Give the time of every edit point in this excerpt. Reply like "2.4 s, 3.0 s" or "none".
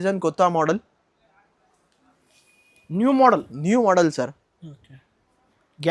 none